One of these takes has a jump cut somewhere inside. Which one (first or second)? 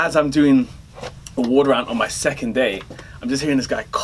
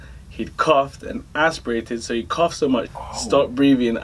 second